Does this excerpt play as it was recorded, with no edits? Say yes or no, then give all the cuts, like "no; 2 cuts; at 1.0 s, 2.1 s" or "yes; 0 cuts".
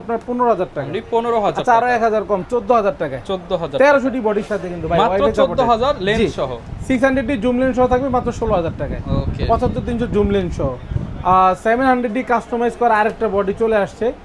yes; 0 cuts